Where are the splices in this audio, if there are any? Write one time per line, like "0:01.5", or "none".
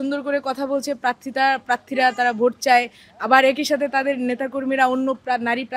none